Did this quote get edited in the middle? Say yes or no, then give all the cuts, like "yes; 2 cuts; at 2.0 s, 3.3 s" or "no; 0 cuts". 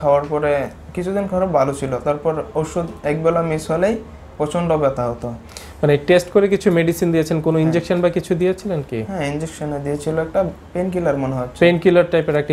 no; 0 cuts